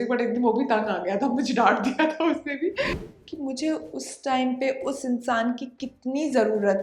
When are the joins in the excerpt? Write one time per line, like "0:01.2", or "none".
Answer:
0:03.0

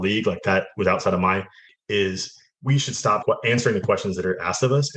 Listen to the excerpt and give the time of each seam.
0:01.7
0:03.2

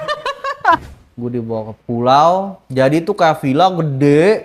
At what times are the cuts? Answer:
0:00.8
0:02.6

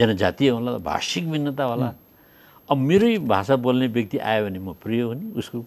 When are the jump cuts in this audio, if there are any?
none

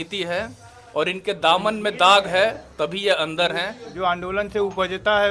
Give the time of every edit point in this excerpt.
0:03.9

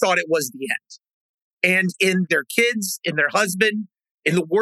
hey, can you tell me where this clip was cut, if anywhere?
0:02.3

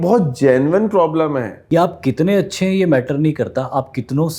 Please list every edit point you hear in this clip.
0:01.6

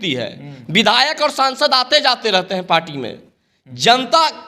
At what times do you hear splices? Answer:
none

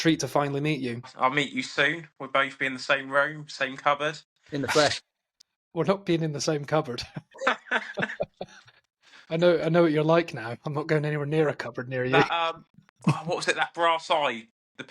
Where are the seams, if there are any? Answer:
0:01.1

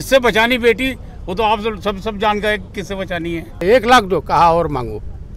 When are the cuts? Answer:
0:03.6

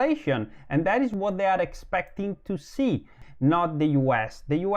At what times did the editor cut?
0:03.2

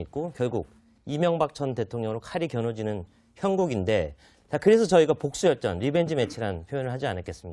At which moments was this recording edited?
none

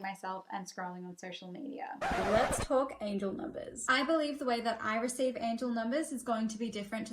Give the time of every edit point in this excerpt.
none

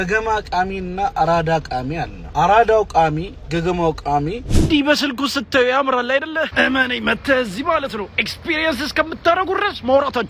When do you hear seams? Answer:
0:02.2
0:03.3
0:04.5

